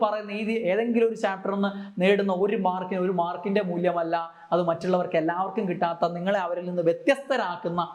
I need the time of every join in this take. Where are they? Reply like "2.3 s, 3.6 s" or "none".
none